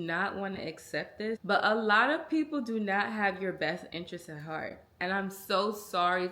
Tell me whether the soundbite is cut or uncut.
cut